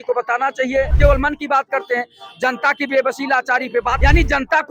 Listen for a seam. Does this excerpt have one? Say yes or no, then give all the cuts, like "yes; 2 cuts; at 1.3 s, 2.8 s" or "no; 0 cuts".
yes; 2 cuts; at 0.9 s, 4.0 s